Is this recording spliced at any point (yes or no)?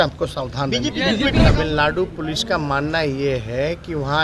yes